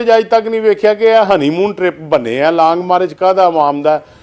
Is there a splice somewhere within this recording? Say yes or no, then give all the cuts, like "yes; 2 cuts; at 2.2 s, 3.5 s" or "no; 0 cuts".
no; 0 cuts